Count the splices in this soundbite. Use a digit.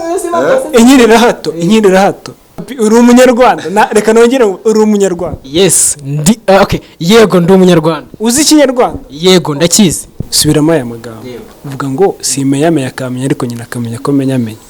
1